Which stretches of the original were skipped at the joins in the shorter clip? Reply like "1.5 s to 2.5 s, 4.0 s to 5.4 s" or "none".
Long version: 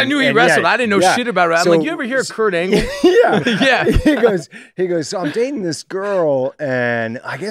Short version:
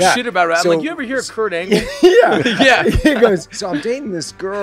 4.6 s to 5.1 s